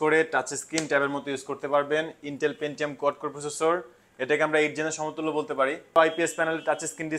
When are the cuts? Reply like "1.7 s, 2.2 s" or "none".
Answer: 6.0 s